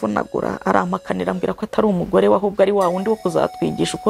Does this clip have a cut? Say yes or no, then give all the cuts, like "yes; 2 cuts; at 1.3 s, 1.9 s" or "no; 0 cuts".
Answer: no; 0 cuts